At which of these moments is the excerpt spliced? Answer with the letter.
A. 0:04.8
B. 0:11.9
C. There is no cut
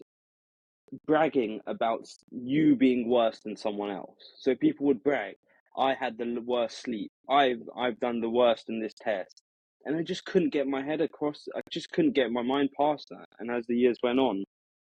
C